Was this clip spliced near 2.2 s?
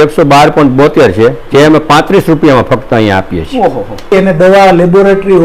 no; 1 cut; at 4.1 s

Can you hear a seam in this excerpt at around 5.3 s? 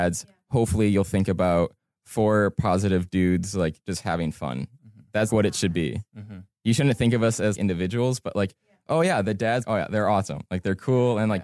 yes; 3 cuts; at 5.3 s, 7.6 s, 9.6 s

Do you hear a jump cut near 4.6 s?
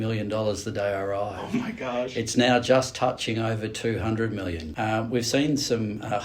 yes; 1 cut; at 4.6 s

